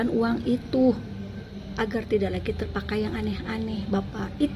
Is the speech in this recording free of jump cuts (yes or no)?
yes